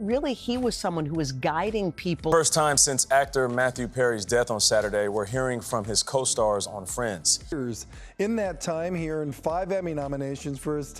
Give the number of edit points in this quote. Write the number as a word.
two